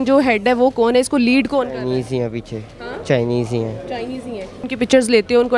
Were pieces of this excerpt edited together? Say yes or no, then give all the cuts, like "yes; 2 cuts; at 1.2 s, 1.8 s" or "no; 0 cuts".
yes; 1 cut; at 4.6 s